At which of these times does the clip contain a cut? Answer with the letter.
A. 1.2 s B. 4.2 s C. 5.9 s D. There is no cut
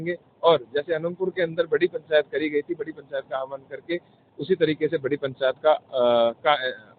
B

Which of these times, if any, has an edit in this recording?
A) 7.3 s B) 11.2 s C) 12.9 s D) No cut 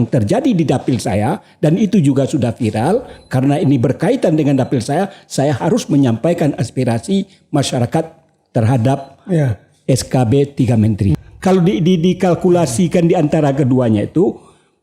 B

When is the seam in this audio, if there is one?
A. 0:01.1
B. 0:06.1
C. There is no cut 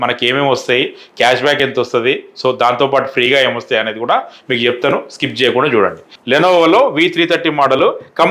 B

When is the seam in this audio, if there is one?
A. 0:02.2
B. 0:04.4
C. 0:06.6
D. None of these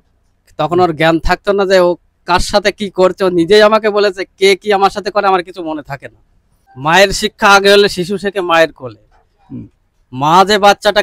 C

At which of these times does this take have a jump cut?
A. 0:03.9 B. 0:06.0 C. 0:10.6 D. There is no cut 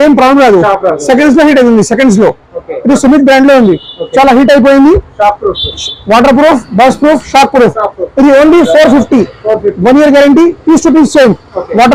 D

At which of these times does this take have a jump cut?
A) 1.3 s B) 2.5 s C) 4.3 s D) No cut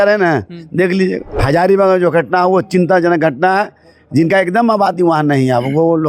A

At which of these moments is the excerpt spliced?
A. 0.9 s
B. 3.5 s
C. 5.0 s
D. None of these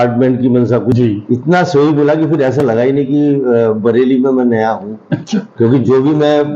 A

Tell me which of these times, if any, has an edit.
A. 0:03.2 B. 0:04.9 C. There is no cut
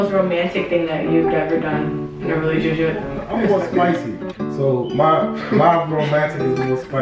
A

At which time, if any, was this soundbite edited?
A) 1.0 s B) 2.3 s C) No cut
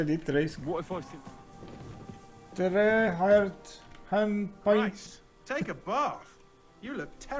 A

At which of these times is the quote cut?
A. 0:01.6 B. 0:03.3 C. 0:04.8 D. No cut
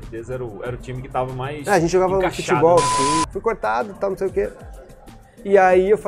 B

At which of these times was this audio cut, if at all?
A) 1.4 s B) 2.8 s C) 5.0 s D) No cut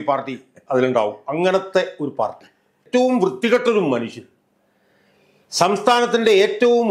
B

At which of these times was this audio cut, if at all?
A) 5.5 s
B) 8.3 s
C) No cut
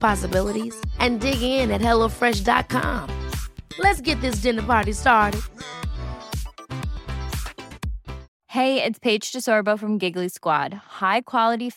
B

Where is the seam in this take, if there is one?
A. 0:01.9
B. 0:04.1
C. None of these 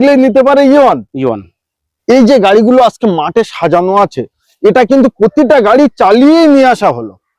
A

